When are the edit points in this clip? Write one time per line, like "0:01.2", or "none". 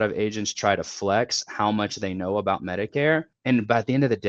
0:03.3